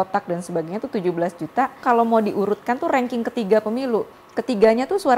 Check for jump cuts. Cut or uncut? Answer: cut